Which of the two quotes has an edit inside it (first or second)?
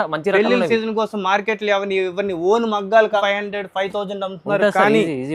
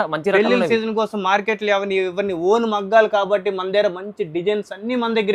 first